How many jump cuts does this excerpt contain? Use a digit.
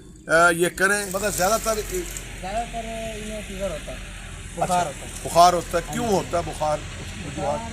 1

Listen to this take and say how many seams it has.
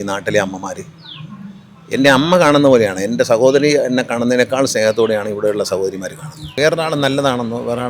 1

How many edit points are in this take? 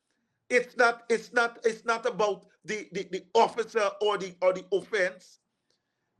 0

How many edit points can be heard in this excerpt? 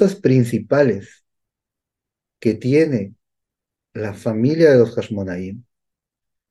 0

